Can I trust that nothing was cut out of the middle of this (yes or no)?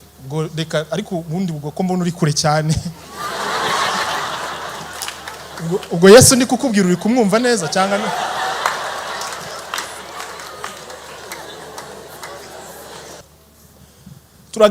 no